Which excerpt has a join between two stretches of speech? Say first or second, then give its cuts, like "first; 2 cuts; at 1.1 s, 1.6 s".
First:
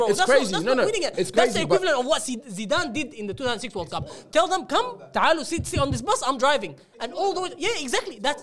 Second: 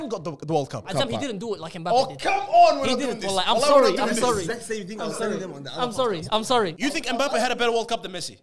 second; 2 cuts; at 0.8 s, 6.8 s